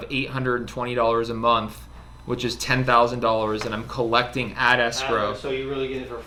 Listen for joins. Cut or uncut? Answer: uncut